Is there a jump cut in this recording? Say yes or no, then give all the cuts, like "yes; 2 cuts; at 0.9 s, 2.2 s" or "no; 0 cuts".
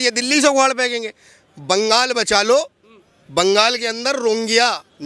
no; 0 cuts